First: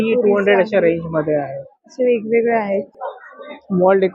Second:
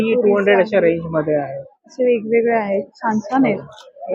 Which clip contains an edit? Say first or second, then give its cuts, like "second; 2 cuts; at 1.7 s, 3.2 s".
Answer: first; 1 cut; at 2.9 s